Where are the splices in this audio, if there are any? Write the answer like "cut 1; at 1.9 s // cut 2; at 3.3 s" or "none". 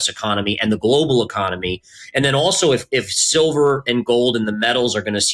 none